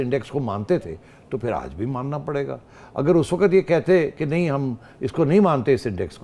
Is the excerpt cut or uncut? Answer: uncut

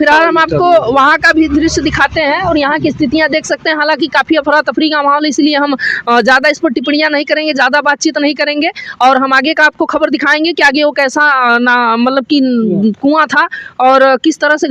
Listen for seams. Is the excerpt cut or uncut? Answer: uncut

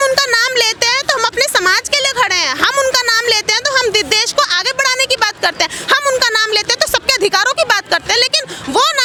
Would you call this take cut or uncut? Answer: uncut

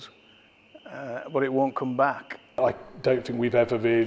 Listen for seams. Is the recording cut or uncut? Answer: cut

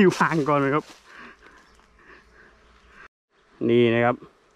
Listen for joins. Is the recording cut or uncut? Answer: cut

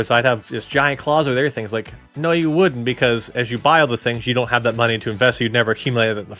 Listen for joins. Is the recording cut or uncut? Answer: uncut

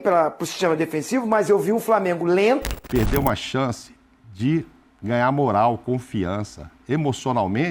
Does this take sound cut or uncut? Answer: cut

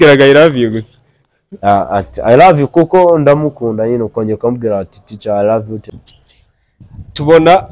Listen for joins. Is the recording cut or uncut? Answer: cut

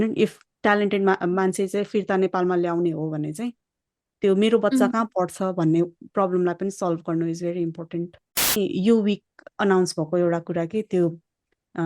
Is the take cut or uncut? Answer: cut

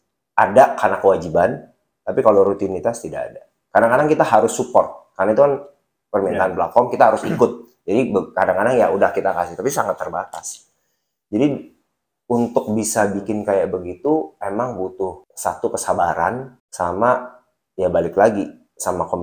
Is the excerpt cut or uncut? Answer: cut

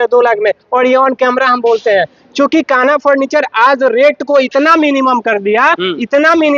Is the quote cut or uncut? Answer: uncut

